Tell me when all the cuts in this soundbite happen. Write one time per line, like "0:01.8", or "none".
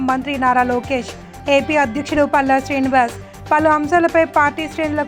none